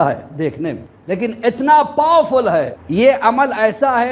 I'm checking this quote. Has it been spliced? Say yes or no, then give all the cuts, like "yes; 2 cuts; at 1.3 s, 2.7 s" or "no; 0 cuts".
yes; 2 cuts; at 0.9 s, 2.8 s